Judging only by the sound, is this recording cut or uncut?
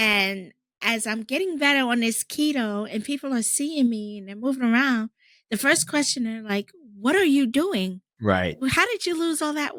uncut